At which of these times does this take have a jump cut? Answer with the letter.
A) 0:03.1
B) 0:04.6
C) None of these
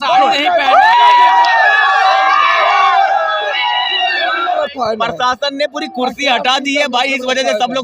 B